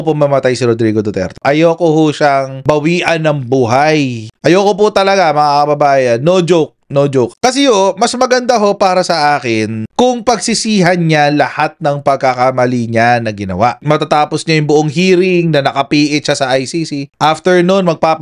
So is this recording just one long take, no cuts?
no; 3 cuts; at 1.4 s, 7.3 s, 13.8 s

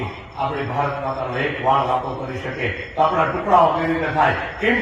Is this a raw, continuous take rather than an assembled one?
yes; 0 cuts

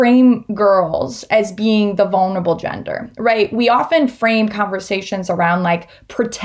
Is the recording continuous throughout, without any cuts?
yes; 0 cuts

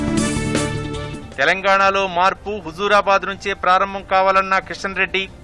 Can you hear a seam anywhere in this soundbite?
yes; 1 cut; at 1.1 s

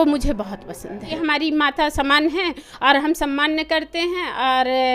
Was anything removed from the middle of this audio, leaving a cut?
yes; 1 cut; at 1.0 s

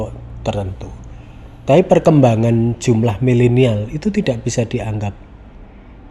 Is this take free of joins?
yes; 0 cuts

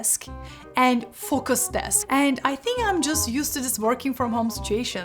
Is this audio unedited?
no; 1 cut; at 1.9 s

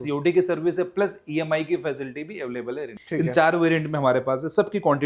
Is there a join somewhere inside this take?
yes; 1 cut; at 2.9 s

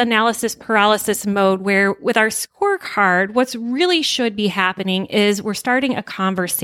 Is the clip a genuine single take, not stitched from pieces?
yes; 0 cuts

